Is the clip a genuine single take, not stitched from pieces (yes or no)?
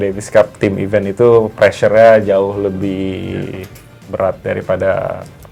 yes